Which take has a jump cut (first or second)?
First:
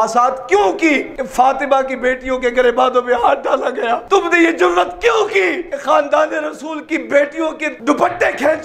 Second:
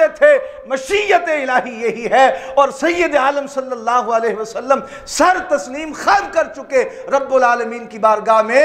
first